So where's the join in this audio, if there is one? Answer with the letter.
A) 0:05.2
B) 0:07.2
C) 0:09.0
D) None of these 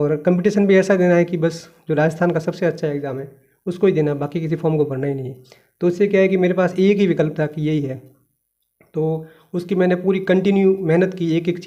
D